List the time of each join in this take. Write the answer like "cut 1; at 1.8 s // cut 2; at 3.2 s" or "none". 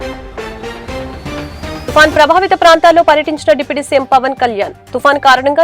cut 1; at 1.8 s